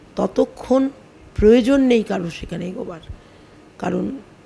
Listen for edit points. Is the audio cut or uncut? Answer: uncut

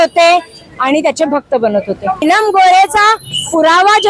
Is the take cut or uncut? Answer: cut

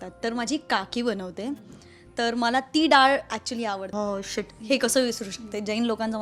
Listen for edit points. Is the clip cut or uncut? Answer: cut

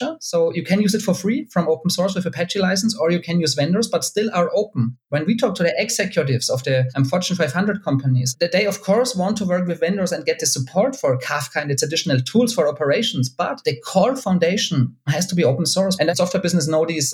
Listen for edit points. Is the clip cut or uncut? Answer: cut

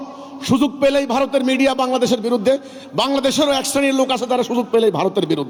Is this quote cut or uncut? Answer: uncut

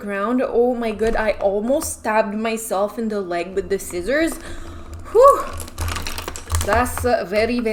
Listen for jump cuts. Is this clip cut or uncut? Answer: uncut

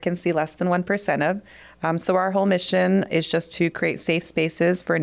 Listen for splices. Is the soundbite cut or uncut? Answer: uncut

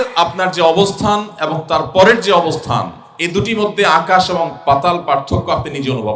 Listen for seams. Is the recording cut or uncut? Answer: uncut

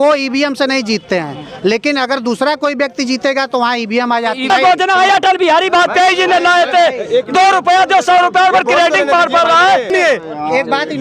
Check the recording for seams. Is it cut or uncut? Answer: cut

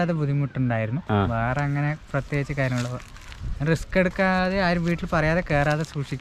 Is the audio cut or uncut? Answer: uncut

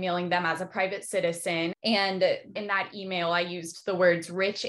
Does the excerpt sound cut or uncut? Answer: cut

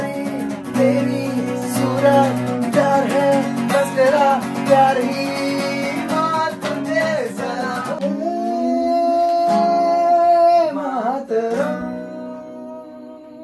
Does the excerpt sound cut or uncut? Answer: cut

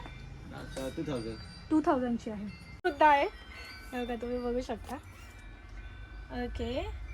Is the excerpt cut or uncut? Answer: cut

